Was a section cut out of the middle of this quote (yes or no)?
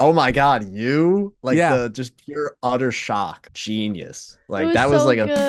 yes